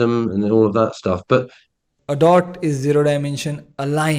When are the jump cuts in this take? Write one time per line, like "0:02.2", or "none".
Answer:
0:01.9